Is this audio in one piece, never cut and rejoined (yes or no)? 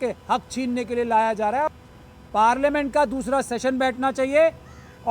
no